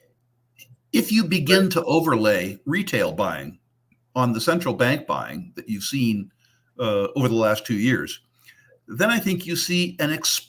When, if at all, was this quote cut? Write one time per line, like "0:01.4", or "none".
none